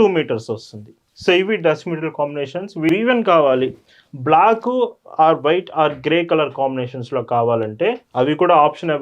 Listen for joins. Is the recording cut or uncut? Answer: cut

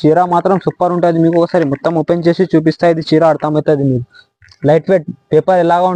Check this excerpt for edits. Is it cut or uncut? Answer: uncut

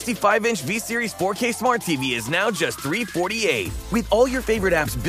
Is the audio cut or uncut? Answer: uncut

